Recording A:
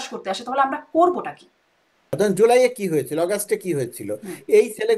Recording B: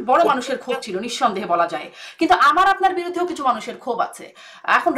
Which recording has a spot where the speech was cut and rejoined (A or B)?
A